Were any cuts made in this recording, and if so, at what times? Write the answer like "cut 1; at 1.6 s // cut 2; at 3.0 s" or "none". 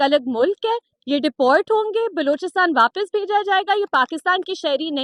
none